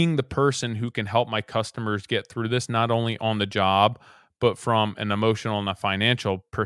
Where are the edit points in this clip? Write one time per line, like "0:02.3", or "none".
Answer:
none